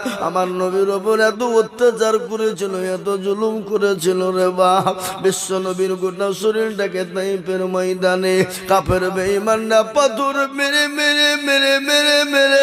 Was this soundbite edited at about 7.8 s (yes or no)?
no